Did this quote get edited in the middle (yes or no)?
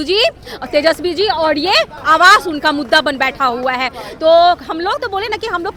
no